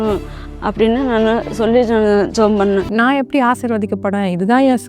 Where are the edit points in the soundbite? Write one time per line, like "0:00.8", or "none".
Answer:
0:02.9